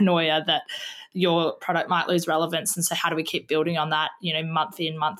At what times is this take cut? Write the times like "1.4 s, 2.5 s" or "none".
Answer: none